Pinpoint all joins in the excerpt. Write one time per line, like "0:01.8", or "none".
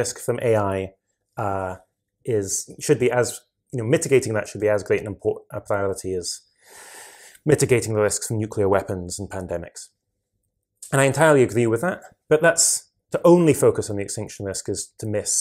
none